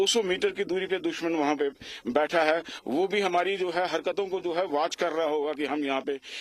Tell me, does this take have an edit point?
no; 0 cuts

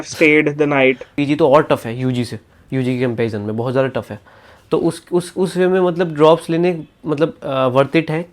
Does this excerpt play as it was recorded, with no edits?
no; 1 cut; at 1.1 s

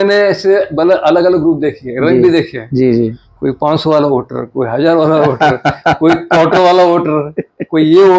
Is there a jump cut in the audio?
no; 0 cuts

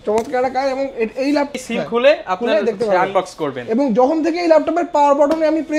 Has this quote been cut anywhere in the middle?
yes; 1 cut; at 1.5 s

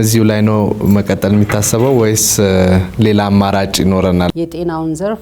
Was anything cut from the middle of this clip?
yes; 1 cut; at 4.3 s

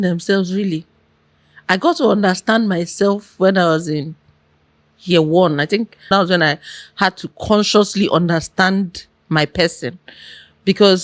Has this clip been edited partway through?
yes; 1 cut; at 6.1 s

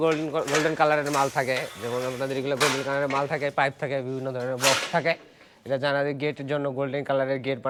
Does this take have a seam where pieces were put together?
no; 0 cuts

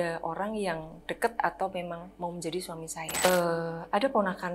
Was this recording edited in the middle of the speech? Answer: yes; 1 cut; at 3.2 s

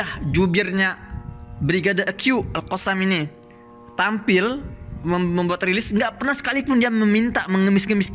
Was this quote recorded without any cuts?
yes; 0 cuts

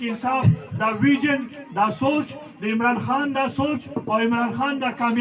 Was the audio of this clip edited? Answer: no; 0 cuts

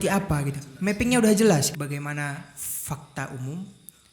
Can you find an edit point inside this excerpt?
yes; 1 cut; at 1.7 s

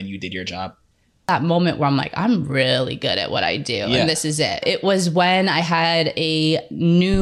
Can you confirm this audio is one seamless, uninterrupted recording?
no; 2 cuts; at 1.3 s, 4.6 s

